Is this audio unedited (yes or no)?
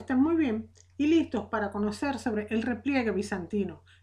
yes